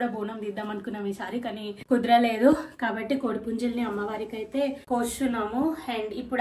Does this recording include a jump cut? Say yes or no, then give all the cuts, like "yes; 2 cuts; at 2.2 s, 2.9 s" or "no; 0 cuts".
no; 0 cuts